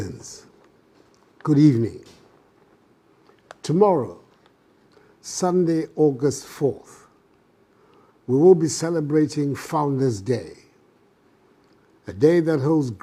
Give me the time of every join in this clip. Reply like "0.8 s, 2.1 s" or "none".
none